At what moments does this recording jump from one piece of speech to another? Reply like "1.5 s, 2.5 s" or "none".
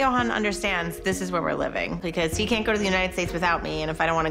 2.0 s